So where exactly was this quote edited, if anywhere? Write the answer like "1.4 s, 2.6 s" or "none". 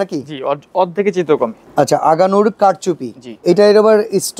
1.6 s, 3.4 s